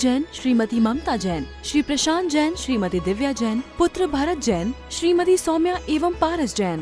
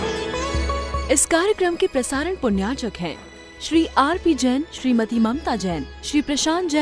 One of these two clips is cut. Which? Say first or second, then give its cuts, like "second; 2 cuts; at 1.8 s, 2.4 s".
second; 1 cut; at 1.0 s